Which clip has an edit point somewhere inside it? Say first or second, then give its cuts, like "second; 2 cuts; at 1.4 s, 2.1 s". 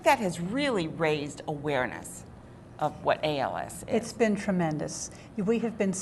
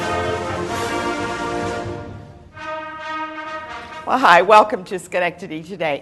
first; 1 cut; at 2.7 s